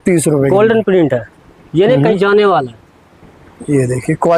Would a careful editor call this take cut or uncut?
uncut